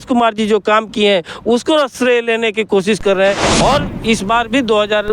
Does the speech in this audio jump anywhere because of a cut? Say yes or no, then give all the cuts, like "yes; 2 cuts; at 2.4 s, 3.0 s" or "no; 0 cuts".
yes; 1 cut; at 3.5 s